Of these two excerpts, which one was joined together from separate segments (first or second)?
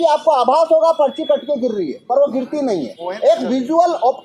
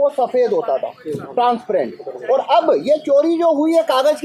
first